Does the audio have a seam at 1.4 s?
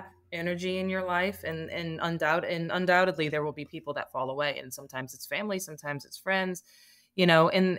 no; 0 cuts

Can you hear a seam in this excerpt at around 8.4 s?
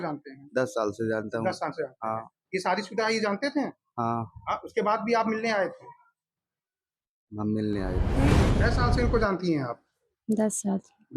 yes; 1 cut; at 8.4 s

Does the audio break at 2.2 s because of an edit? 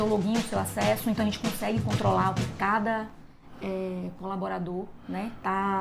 no; 0 cuts

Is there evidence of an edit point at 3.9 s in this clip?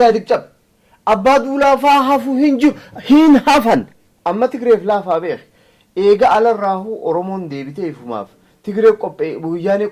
yes; 1 cut; at 3.9 s

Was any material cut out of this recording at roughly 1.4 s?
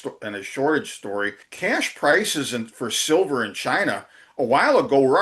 yes; 1 cut; at 1.4 s

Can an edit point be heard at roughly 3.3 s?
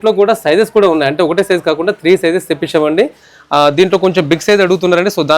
no; 0 cuts

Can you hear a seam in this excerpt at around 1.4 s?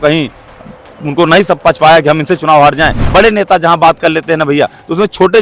no; 1 cut; at 3.0 s

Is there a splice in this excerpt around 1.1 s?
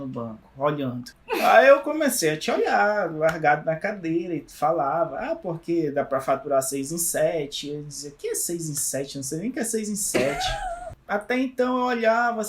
yes; 2 cuts; at 1.1 s, 10.9 s

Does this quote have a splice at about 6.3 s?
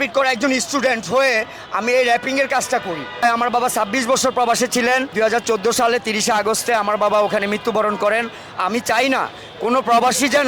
no; 2 cuts; at 3.2 s, 5.1 s

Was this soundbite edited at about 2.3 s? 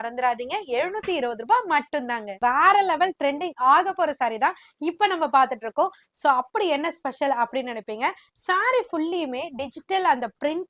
yes; 1 cut; at 2.3 s

